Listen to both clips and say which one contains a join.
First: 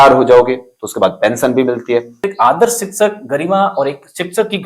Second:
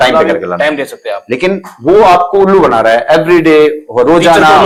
first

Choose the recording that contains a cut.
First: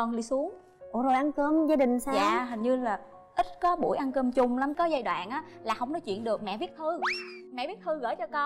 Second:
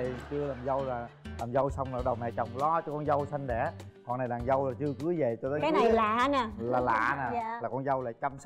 first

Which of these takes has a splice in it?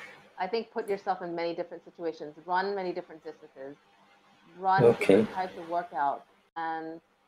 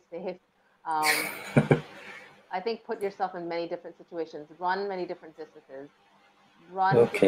first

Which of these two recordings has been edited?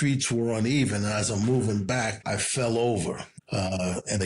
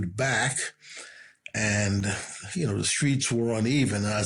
first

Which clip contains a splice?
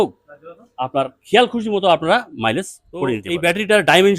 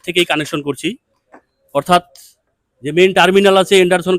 first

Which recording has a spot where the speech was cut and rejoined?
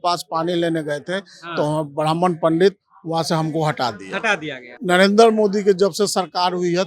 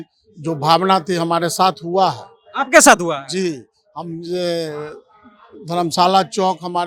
first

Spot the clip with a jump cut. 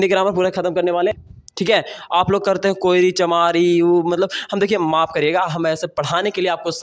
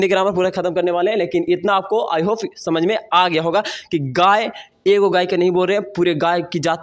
first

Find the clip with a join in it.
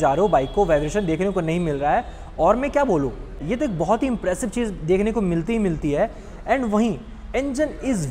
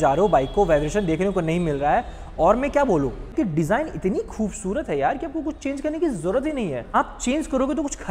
second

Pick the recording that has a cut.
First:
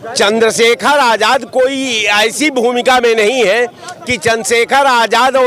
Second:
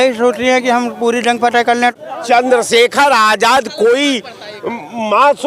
second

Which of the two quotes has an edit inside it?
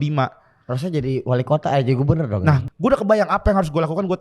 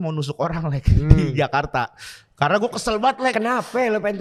first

